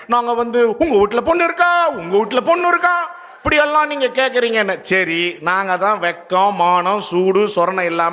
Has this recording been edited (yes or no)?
no